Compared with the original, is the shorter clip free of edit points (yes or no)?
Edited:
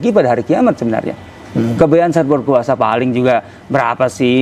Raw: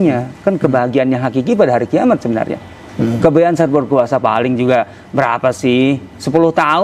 yes